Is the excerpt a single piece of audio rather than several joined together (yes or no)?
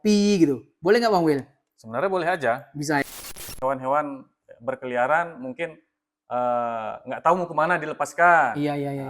no